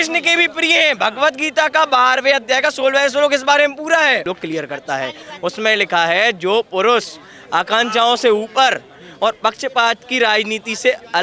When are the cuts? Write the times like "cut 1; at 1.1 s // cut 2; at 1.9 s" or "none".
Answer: cut 1; at 4.2 s